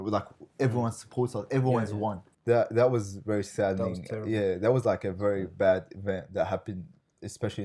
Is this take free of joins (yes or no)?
no